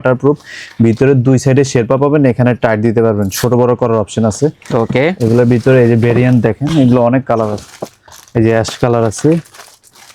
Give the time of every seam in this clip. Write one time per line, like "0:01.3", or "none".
none